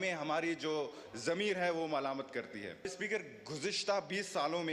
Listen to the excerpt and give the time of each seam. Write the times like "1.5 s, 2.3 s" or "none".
2.9 s

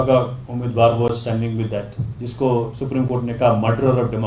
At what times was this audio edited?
none

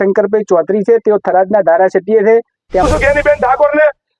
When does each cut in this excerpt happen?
2.9 s

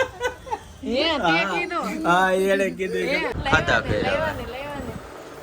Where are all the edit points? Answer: 3.3 s

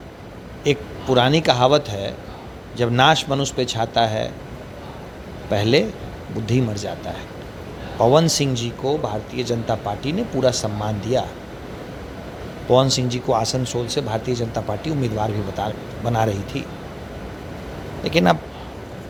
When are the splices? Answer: none

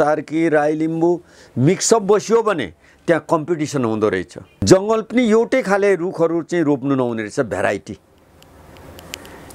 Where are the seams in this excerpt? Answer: 4.6 s

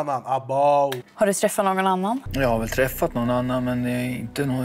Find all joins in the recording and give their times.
1.0 s, 2.3 s

